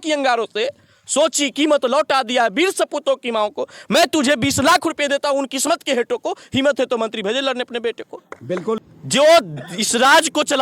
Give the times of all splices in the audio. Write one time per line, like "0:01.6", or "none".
0:08.8